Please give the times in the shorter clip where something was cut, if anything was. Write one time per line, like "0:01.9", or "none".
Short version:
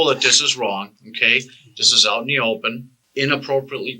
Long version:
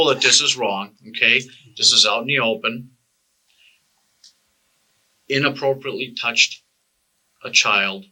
0:02.9